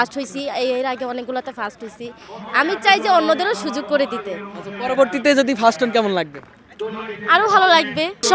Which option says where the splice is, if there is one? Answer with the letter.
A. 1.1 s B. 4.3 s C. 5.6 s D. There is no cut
D